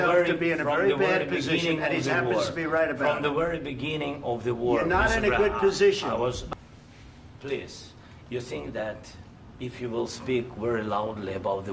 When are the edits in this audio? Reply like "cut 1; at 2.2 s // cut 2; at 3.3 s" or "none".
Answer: cut 1; at 6.4 s